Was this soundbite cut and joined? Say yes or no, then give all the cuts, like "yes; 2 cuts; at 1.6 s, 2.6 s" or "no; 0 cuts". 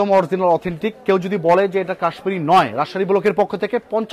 no; 0 cuts